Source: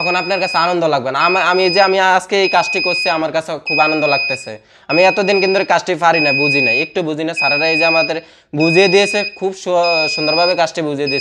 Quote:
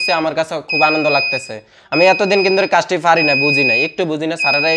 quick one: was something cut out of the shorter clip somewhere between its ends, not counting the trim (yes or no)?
no